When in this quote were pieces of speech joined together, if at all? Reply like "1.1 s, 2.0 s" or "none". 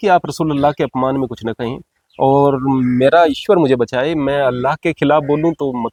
none

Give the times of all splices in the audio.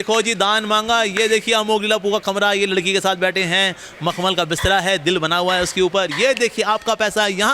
none

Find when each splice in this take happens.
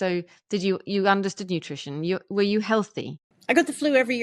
3.3 s

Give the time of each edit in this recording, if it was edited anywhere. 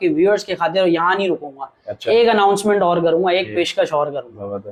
none

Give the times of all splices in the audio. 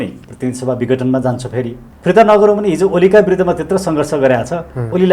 1.8 s

